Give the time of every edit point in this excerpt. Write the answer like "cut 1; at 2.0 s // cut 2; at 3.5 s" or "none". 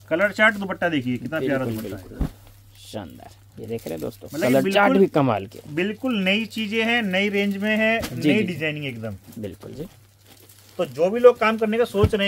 none